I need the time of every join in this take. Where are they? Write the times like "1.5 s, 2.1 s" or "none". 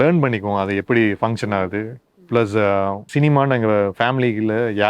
3.0 s